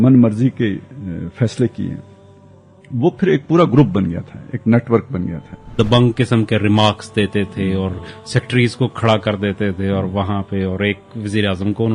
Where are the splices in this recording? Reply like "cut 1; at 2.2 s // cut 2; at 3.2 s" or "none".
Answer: cut 1; at 5.6 s

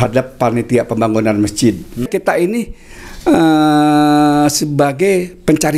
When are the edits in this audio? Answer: cut 1; at 2.1 s

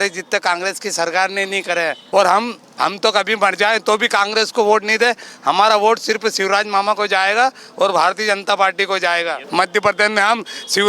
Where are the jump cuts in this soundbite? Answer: cut 1; at 2.0 s // cut 2; at 9.4 s

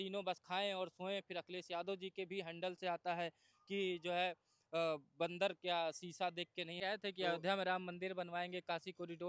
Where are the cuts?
cut 1; at 6.7 s

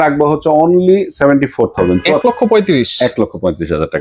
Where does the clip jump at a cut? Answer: cut 1; at 2.1 s

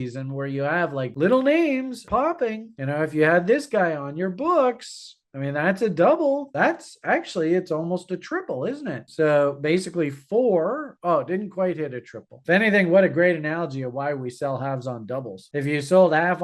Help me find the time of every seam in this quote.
cut 1; at 1.1 s // cut 2; at 2.1 s

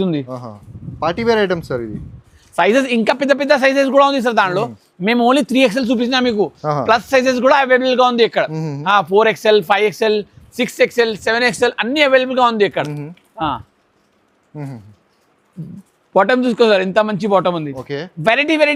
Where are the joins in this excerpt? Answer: none

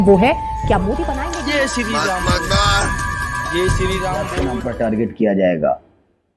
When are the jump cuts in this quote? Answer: cut 1; at 1.1 s // cut 2; at 4.5 s

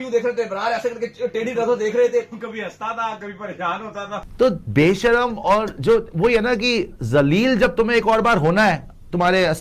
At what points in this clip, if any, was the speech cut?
cut 1; at 4.2 s

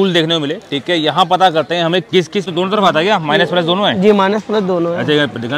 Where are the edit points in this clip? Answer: cut 1; at 2.5 s

